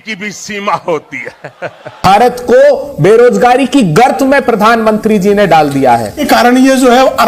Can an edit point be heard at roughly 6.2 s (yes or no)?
yes